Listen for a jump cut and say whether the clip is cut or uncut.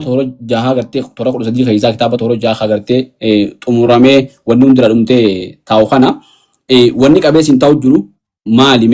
uncut